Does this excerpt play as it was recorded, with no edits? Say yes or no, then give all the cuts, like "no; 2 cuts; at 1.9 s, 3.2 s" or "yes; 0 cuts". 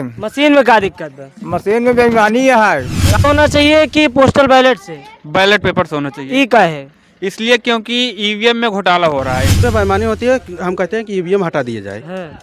no; 2 cuts; at 3.0 s, 9.6 s